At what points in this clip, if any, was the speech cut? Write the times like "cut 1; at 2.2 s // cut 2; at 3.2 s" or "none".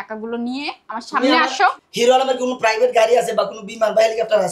cut 1; at 1.9 s